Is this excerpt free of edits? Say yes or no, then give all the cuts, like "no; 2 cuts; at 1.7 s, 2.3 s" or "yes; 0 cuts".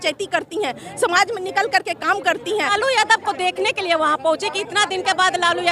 no; 1 cut; at 2.7 s